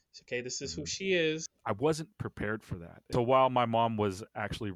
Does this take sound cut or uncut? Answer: cut